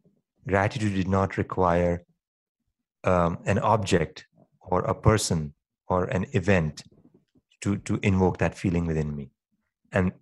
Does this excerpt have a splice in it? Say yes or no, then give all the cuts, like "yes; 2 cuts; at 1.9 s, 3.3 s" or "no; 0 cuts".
no; 0 cuts